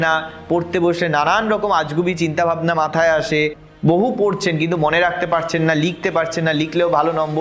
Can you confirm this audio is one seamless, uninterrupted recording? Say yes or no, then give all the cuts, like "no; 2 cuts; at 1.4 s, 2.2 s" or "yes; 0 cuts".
yes; 0 cuts